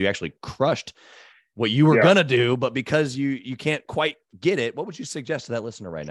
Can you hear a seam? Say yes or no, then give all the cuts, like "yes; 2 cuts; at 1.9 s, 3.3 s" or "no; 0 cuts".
no; 0 cuts